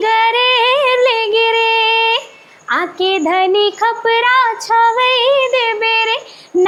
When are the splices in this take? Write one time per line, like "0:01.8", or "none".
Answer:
none